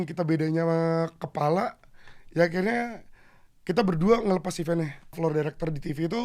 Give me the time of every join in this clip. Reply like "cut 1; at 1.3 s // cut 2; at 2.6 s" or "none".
cut 1; at 5.2 s